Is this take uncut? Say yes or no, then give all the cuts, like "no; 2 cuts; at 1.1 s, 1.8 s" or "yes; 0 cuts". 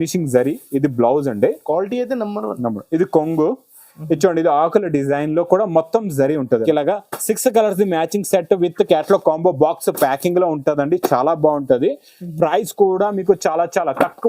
no; 1 cut; at 6.6 s